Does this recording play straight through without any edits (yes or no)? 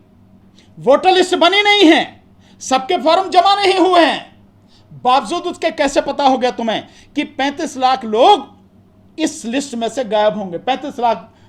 yes